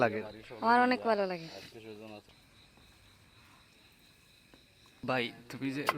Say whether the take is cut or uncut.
cut